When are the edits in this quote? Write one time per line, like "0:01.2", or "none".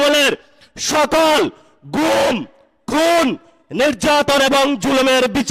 none